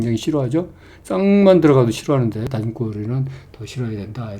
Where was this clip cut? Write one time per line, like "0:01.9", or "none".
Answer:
none